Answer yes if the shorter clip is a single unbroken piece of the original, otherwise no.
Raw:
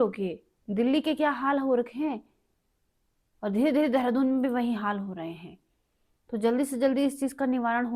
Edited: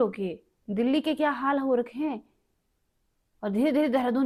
yes